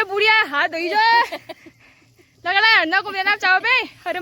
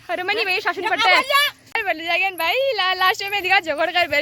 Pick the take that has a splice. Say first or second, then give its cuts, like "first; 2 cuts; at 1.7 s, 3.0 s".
second; 1 cut; at 1.6 s